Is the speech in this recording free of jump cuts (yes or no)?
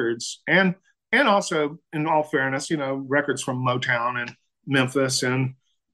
yes